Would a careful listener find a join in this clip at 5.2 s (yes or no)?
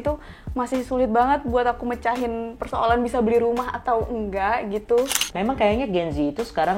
yes